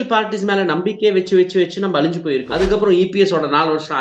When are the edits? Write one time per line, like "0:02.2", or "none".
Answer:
0:02.7